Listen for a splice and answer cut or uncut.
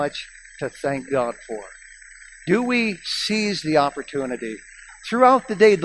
uncut